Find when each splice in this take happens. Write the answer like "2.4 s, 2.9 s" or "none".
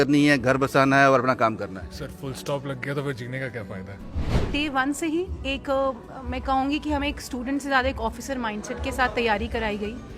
4.5 s

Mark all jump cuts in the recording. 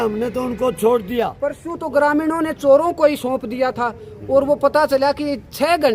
1.7 s

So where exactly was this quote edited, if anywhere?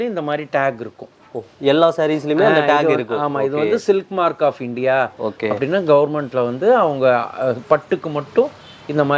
none

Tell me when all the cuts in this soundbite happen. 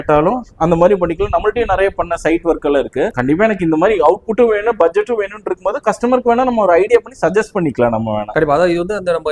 3.2 s, 8.3 s

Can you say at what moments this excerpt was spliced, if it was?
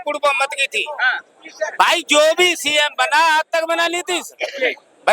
none

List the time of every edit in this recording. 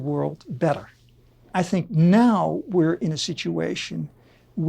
1.5 s

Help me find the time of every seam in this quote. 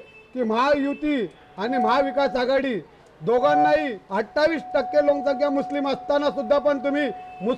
4.0 s

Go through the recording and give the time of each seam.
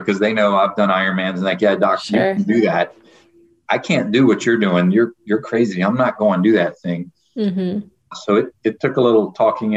none

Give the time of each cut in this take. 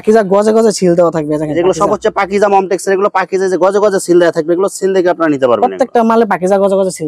none

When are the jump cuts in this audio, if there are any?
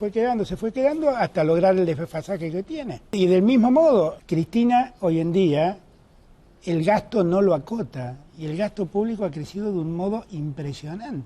3.2 s, 4.2 s

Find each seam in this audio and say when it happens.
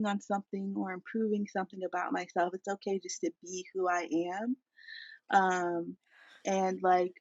none

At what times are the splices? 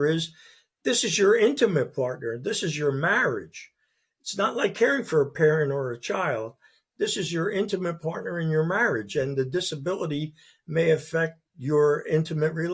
none

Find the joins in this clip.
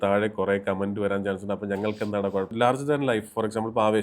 2.5 s

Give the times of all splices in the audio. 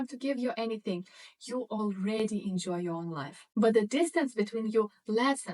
3.5 s

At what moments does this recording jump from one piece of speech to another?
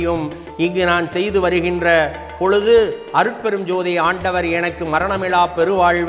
none

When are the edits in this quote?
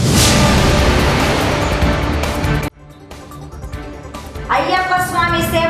3.9 s

